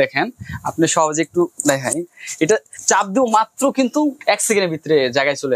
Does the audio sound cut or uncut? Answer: cut